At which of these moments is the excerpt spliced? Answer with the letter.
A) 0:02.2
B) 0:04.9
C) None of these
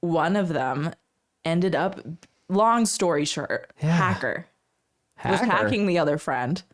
A